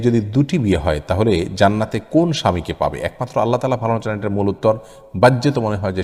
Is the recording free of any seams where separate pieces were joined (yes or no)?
yes